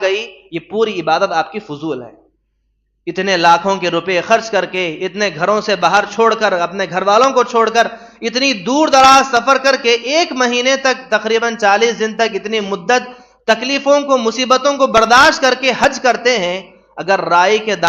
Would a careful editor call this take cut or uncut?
uncut